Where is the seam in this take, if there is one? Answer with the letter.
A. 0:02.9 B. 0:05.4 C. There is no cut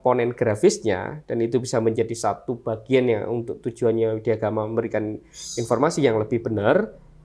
C